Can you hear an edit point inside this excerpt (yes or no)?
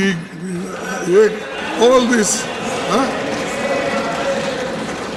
no